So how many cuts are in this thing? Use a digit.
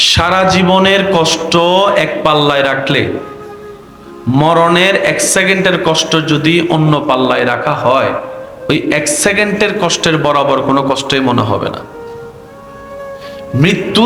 0